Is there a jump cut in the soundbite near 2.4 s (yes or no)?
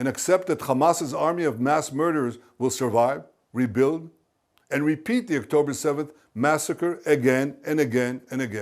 no